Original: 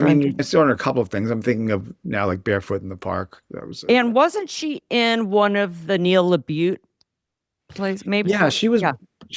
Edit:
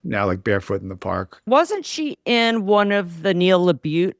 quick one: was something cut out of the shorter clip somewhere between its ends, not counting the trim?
yes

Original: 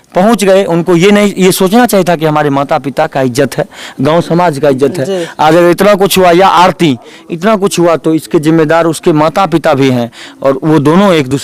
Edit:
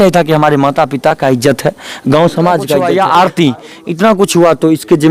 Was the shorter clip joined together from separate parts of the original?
yes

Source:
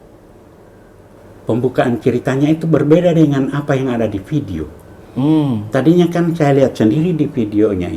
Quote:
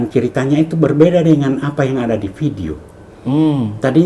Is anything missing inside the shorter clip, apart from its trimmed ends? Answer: no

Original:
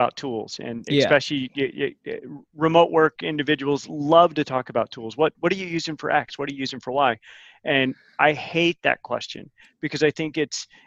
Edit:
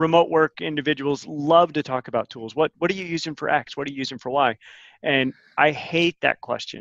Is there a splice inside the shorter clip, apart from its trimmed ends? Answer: no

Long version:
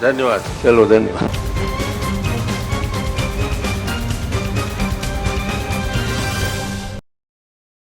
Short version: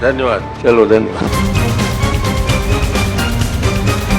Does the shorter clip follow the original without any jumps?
no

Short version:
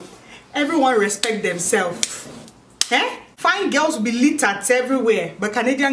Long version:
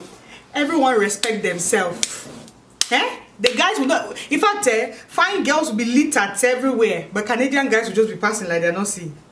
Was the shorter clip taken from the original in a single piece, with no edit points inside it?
no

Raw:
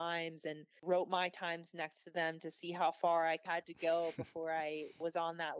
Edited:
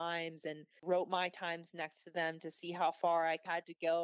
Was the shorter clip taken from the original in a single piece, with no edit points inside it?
yes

